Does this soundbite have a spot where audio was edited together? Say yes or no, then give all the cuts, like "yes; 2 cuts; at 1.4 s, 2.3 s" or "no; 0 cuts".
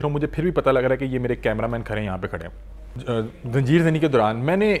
yes; 1 cut; at 2.9 s